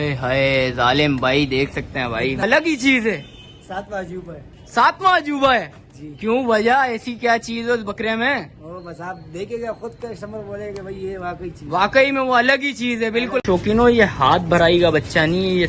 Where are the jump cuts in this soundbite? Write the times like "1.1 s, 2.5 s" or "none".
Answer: 2.4 s, 13.4 s